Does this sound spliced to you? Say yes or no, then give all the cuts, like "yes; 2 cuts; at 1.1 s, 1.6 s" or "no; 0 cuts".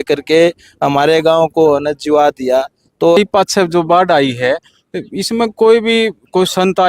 yes; 1 cut; at 3.2 s